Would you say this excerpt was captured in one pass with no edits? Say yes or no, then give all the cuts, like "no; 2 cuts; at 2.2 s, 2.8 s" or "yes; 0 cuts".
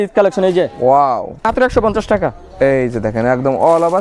no; 1 cut; at 1.4 s